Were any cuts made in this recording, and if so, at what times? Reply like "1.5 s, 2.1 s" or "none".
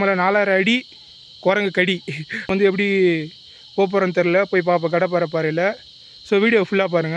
2.5 s

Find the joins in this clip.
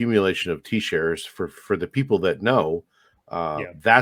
none

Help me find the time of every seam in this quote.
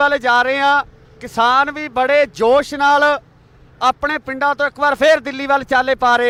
none

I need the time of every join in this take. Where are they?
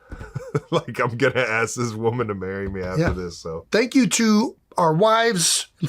3.6 s

